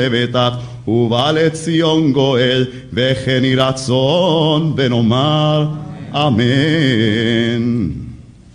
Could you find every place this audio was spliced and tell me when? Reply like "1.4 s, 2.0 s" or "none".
none